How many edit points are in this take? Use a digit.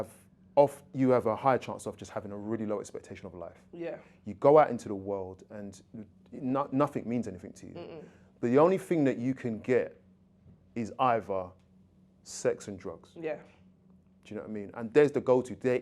0